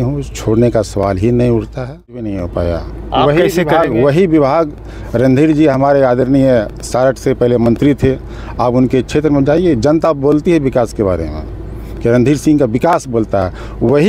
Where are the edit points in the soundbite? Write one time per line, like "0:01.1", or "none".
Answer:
0:02.3